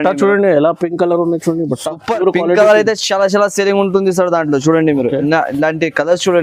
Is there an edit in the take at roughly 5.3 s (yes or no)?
no